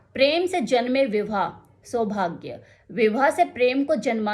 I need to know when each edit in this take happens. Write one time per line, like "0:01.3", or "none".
none